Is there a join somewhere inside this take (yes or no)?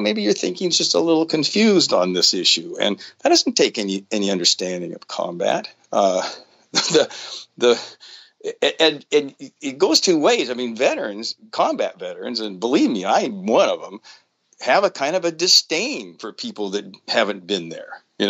no